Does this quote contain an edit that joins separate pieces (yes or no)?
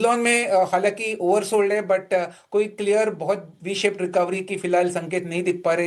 no